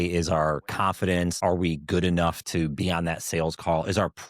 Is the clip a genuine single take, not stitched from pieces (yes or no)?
no